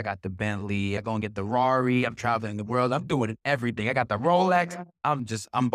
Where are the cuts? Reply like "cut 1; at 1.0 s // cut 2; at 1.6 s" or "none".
cut 1; at 1.0 s // cut 2; at 5.0 s